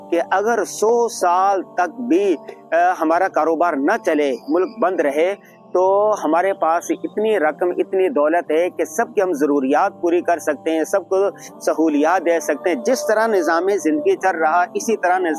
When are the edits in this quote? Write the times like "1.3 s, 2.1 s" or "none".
none